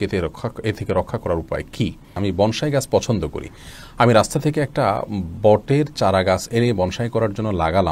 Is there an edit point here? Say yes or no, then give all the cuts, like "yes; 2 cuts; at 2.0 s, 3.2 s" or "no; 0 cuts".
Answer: yes; 1 cut; at 2.1 s